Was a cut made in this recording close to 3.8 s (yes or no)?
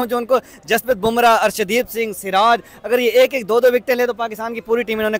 no